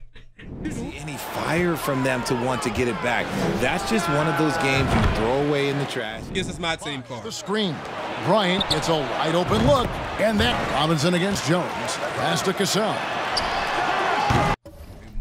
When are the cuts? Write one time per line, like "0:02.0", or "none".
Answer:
0:00.7
0:06.2
0:10.6